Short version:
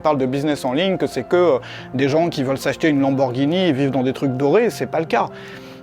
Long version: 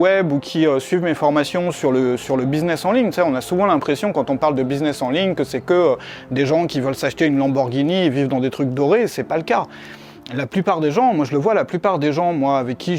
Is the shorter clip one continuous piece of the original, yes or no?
yes